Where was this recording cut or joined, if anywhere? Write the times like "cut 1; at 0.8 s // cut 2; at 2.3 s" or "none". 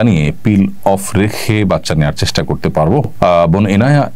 none